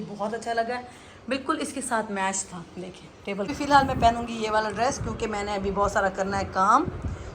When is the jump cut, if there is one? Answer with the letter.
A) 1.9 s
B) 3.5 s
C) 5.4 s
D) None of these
B